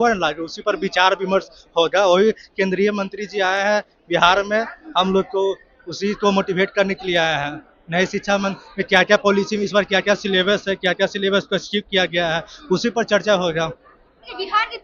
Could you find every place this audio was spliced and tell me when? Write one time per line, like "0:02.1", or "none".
none